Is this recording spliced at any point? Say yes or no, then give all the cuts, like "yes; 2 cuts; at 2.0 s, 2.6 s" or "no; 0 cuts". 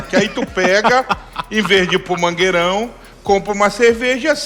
no; 0 cuts